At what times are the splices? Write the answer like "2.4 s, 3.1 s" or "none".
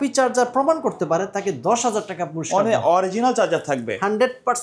none